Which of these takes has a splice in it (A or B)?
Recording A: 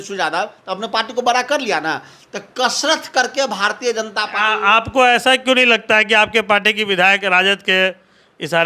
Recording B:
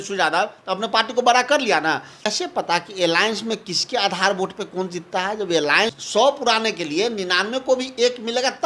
B